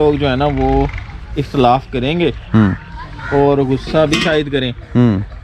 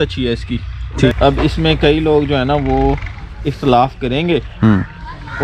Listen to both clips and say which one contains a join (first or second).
second